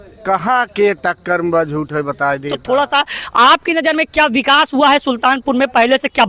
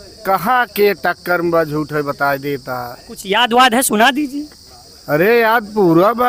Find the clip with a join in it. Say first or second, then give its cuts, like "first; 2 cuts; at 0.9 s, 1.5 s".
first; 1 cut; at 2.6 s